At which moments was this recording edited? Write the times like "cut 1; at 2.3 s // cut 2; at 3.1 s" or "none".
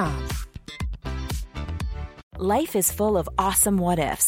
cut 1; at 2.2 s